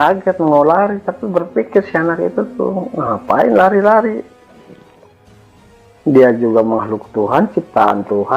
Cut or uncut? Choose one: uncut